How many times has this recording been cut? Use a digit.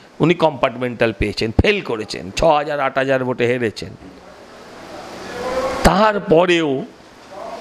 0